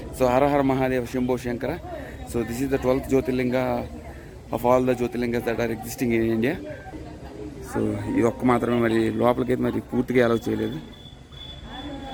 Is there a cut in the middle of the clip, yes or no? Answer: no